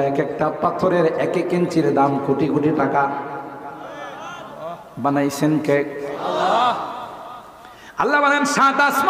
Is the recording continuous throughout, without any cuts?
yes; 0 cuts

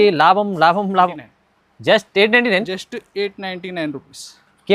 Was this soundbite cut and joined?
yes; 1 cut; at 1.1 s

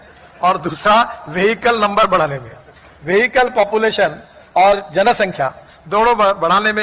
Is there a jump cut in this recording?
no; 0 cuts

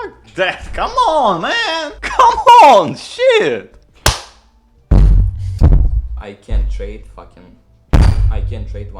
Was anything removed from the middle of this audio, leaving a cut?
yes; 1 cut; at 5.5 s

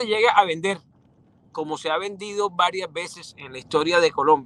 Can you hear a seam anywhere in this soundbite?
no; 0 cuts

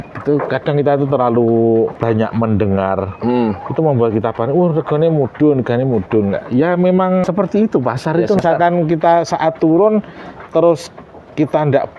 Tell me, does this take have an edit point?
yes; 3 cuts; at 2.0 s, 7.2 s, 8.4 s

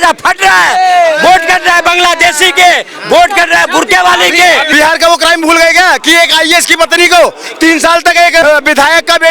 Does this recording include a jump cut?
yes; 2 cuts; at 4.7 s, 8.4 s

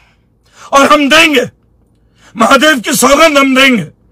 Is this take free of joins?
yes; 0 cuts

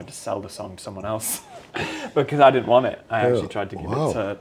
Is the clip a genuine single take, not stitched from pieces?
yes; 0 cuts

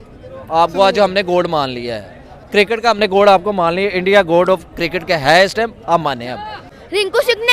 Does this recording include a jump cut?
yes; 1 cut; at 6.6 s

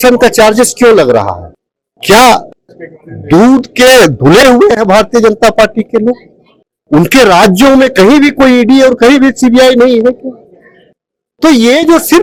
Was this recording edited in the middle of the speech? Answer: no; 0 cuts

